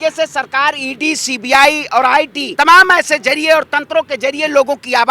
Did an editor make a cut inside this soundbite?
yes; 1 cut; at 2.4 s

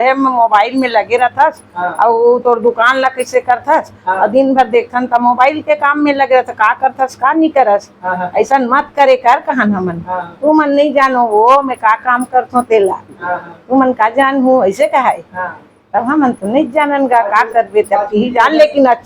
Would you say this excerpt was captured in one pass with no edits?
yes; 0 cuts

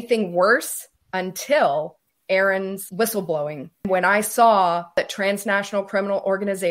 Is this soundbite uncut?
no; 4 cuts; at 2.0 s, 2.8 s, 3.9 s, 5.0 s

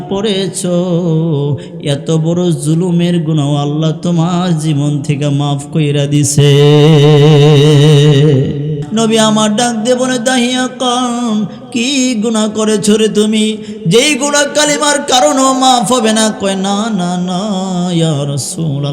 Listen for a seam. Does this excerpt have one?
yes; 1 cut; at 8.8 s

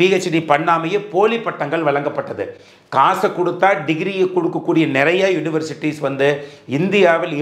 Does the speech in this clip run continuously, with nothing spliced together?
yes; 0 cuts

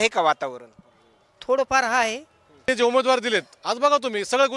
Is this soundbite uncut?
no; 1 cut; at 2.6 s

